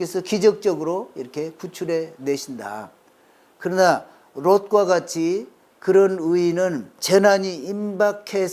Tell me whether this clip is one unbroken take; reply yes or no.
no